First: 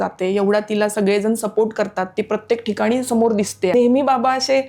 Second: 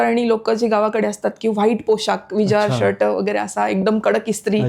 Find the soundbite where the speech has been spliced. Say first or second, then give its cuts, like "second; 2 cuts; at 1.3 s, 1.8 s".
first; 1 cut; at 3.7 s